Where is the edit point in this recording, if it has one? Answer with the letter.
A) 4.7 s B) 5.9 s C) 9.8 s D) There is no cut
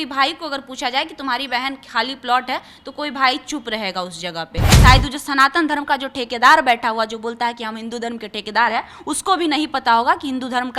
A